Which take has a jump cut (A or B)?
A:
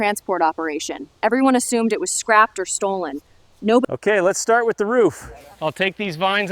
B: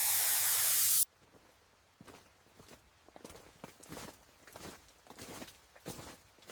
A